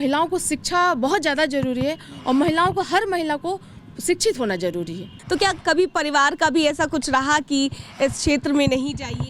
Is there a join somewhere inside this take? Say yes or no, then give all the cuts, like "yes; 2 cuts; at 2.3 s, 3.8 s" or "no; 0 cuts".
yes; 1 cut; at 5.2 s